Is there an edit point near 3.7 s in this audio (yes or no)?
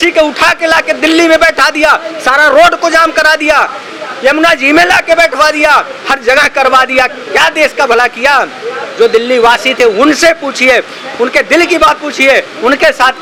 no